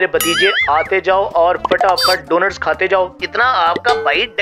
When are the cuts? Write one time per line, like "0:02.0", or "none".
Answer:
0:03.1